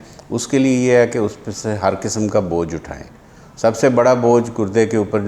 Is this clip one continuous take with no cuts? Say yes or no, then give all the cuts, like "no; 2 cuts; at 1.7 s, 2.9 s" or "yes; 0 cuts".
yes; 0 cuts